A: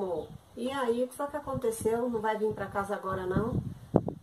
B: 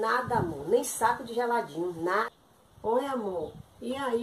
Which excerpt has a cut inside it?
B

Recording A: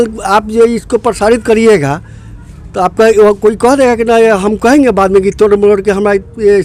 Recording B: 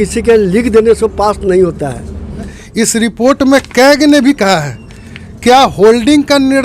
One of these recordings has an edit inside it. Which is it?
B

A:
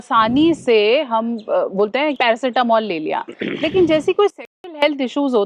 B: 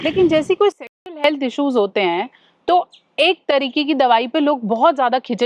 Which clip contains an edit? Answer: A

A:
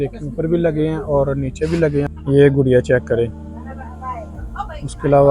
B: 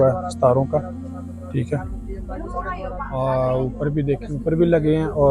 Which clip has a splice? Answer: A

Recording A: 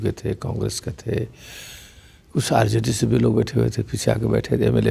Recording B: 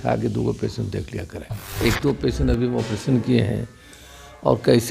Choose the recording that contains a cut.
B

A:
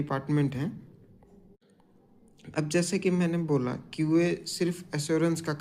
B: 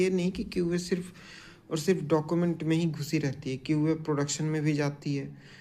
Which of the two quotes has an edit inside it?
A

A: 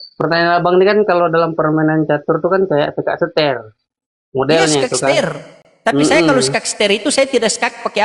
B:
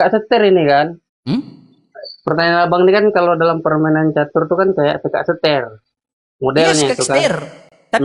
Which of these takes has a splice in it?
B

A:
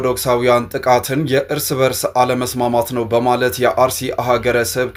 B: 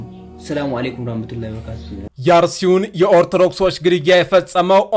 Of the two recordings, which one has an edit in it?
B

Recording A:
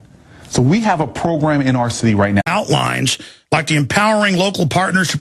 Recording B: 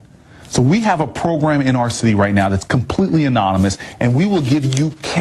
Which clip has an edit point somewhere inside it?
B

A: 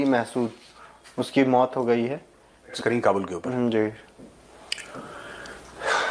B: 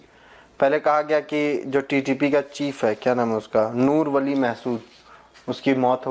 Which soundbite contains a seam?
A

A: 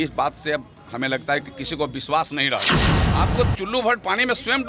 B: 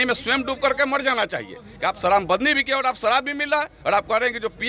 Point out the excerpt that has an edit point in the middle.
A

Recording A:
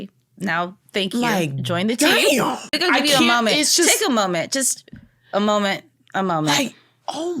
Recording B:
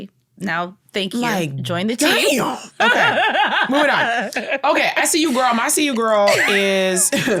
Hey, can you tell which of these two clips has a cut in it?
A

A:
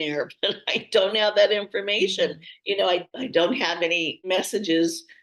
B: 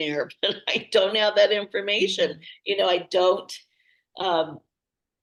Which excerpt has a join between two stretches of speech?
A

